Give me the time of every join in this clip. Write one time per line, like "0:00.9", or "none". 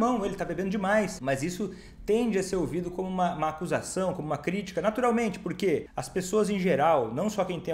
0:01.2
0:06.0